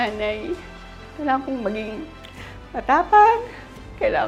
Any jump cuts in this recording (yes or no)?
no